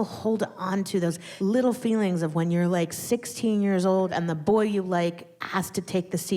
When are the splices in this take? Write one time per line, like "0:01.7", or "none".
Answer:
0:01.3
0:04.1
0:05.3